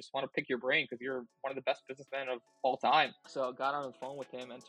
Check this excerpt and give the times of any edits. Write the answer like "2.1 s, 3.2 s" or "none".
3.2 s